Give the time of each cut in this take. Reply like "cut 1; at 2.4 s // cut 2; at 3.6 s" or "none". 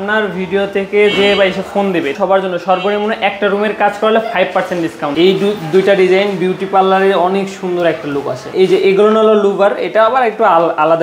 cut 1; at 2.1 s // cut 2; at 5.1 s // cut 3; at 8.4 s